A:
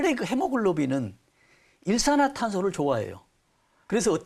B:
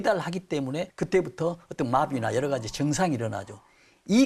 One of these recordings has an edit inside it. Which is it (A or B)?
B